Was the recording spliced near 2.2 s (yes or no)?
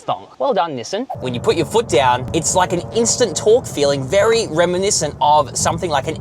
yes